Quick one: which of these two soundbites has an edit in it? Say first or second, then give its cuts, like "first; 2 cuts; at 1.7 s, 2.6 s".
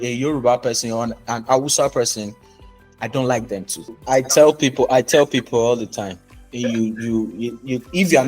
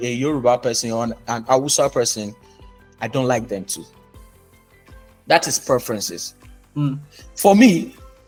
first; 1 cut; at 3.9 s